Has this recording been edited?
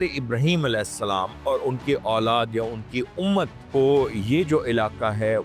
yes; 1 cut; at 3.6 s

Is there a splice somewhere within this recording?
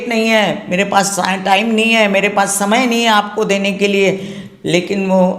no; 0 cuts

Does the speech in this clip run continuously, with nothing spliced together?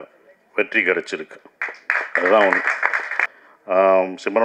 no; 1 cut; at 3.3 s

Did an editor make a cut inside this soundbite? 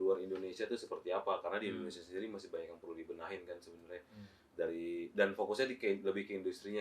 no; 0 cuts

